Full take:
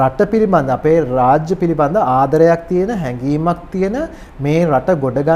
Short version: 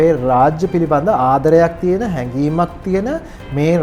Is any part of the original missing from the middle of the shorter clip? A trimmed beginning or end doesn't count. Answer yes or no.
no